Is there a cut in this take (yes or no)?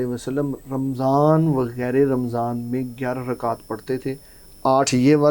no